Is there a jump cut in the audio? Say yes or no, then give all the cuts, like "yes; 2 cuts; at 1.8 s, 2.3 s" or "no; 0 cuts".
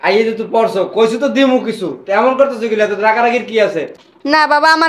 yes; 1 cut; at 3.9 s